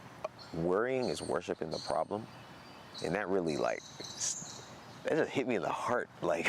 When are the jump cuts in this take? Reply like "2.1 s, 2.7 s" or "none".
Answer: none